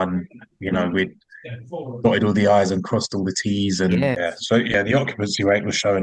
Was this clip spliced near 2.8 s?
no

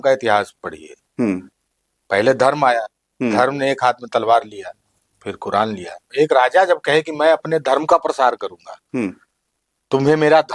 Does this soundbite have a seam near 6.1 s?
yes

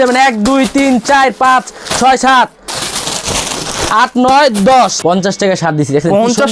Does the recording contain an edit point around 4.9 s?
yes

